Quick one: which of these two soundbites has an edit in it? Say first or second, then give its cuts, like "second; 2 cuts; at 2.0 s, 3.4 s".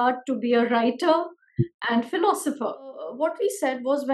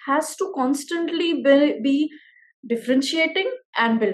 first; 1 cut; at 3.1 s